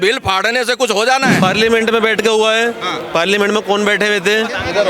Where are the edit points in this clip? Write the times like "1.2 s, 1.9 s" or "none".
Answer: 1.4 s